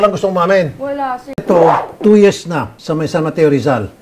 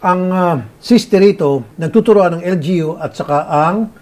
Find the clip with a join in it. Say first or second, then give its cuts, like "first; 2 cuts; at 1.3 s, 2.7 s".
first; 1 cut; at 1.4 s